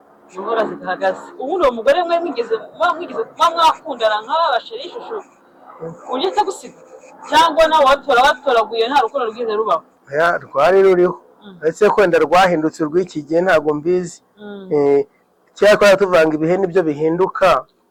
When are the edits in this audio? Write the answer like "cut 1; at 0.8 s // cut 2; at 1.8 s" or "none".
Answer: none